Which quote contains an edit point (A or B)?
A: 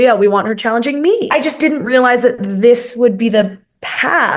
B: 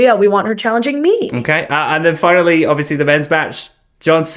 A